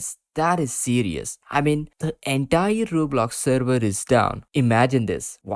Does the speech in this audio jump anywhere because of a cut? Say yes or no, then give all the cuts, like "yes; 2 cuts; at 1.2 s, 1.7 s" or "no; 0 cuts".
no; 0 cuts